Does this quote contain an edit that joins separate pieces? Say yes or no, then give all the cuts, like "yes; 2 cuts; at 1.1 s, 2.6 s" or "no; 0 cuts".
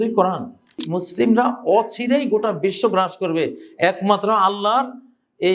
yes; 1 cut; at 0.9 s